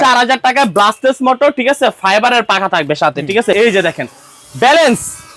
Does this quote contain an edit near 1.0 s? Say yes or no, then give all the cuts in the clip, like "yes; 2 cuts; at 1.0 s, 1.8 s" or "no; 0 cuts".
no; 1 cut; at 3.5 s